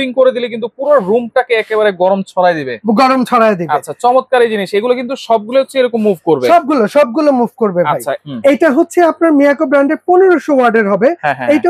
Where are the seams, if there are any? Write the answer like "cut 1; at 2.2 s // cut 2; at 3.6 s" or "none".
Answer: cut 1; at 8.2 s